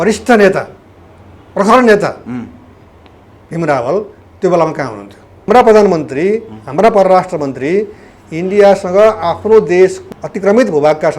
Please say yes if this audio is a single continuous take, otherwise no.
no